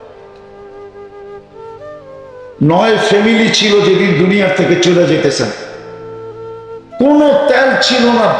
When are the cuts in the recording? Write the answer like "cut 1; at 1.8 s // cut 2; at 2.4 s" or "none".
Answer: none

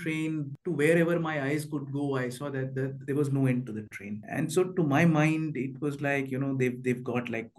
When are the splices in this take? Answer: none

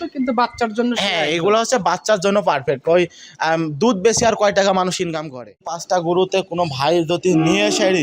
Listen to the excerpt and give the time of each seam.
cut 1; at 5.7 s

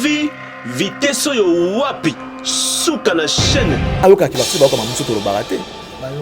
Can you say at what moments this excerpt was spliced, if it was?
cut 1; at 4.0 s

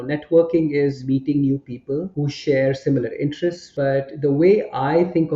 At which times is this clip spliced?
cut 1; at 1.0 s // cut 2; at 2.1 s // cut 3; at 3.6 s

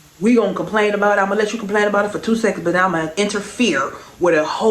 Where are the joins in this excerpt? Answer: cut 1; at 3.1 s

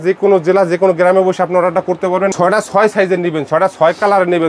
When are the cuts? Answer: cut 1; at 2.3 s

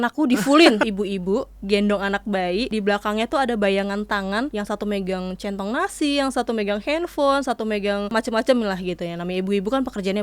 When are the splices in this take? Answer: cut 1; at 0.8 s // cut 2; at 2.7 s // cut 3; at 4.5 s // cut 4; at 8.1 s

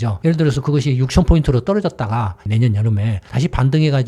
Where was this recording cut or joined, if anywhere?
none

